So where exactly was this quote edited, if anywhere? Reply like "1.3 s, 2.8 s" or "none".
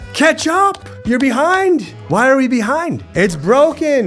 0.9 s, 3.1 s